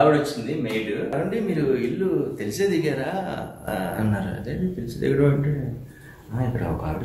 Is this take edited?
yes; 1 cut; at 1.1 s

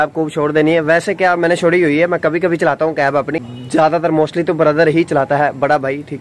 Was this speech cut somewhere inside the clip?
no; 0 cuts

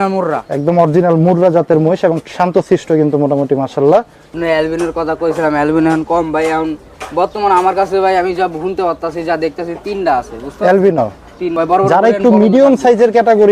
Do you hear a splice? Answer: yes; 2 cuts; at 4.2 s, 11.6 s

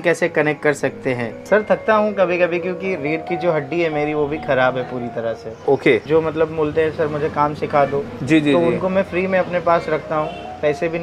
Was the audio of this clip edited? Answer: yes; 2 cuts; at 1.3 s, 6.0 s

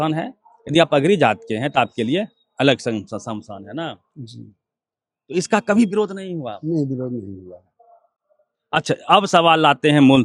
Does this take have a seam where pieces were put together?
no; 0 cuts

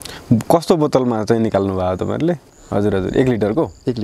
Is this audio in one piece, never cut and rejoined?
no; 1 cut; at 2.5 s

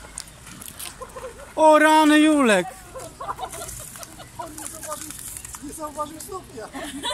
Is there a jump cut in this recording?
no; 0 cuts

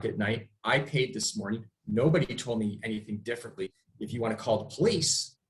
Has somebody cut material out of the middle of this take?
yes; 1 cut; at 3.8 s

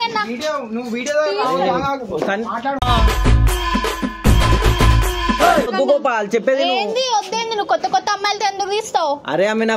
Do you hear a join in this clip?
no; 0 cuts

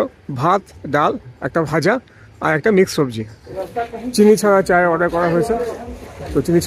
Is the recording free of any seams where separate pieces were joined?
no; 1 cut; at 3.6 s

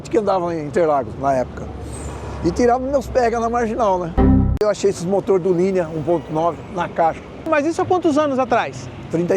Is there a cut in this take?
yes; 2 cuts; at 4.6 s, 7.5 s

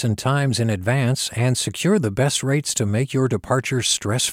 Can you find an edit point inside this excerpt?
no; 0 cuts

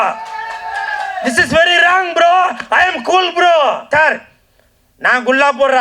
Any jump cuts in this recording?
yes; 1 cut; at 3.9 s

